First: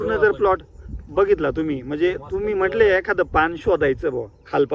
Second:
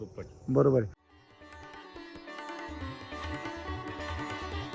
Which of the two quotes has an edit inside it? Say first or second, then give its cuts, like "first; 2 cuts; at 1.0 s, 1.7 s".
second; 1 cut; at 1.1 s